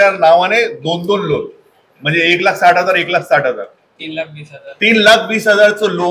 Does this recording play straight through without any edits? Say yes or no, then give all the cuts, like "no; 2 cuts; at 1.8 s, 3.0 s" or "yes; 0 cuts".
yes; 0 cuts